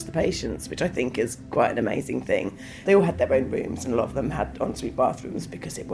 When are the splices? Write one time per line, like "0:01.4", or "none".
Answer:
none